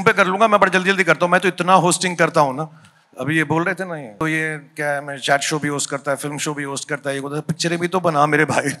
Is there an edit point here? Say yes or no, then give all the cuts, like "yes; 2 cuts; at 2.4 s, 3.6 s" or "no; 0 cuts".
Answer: yes; 1 cut; at 4.2 s